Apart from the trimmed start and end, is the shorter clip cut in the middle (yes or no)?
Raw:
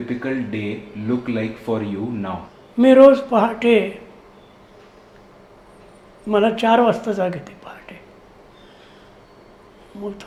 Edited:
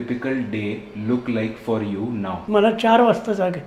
yes